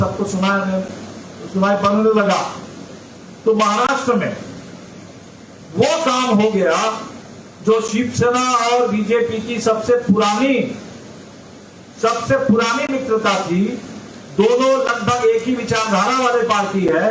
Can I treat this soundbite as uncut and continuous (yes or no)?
yes